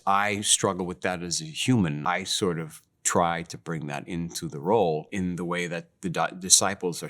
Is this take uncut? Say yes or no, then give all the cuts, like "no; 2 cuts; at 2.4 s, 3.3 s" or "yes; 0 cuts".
no; 2 cuts; at 2.0 s, 5.1 s